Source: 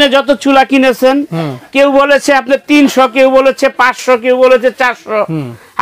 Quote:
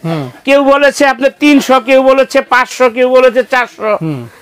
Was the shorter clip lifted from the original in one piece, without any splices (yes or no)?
yes